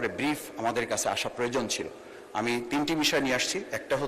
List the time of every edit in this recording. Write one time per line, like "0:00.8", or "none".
none